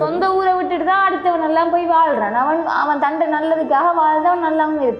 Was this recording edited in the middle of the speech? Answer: no; 0 cuts

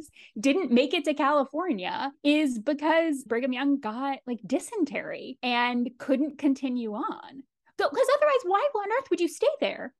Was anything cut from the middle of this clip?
yes; 1 cut; at 3.2 s

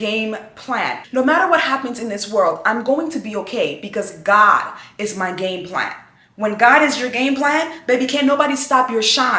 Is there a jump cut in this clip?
yes; 1 cut; at 1.0 s

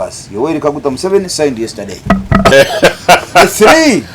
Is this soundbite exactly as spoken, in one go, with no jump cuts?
no; 1 cut; at 2.5 s

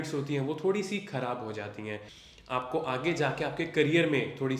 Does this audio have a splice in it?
yes; 1 cut; at 2.1 s

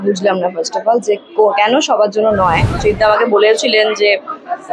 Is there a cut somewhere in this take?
yes; 1 cut; at 2.8 s

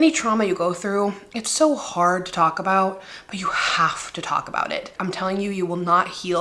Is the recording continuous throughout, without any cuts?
yes; 0 cuts

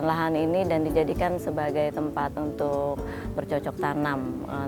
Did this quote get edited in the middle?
no; 0 cuts

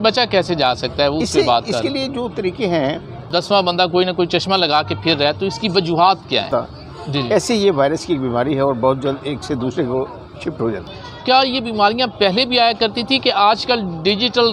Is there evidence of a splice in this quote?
yes; 3 cuts; at 3.2 s, 6.5 s, 10.9 s

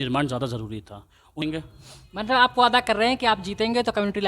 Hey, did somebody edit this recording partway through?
yes; 1 cut; at 1.4 s

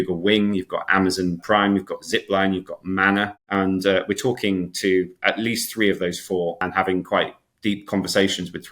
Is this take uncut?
no; 2 cuts; at 3.4 s, 6.6 s

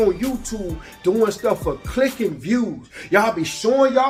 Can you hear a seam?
no; 0 cuts

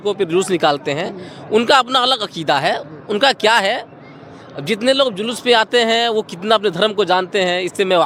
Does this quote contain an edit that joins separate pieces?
no; 0 cuts

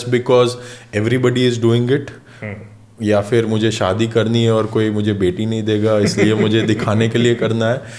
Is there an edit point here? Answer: no; 0 cuts

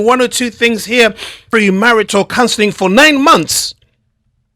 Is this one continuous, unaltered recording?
no; 1 cut; at 1.4 s

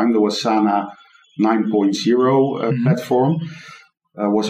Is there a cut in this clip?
no; 0 cuts

